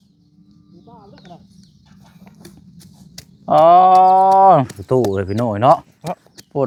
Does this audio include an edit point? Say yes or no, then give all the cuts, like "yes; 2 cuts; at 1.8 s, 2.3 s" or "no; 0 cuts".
no; 0 cuts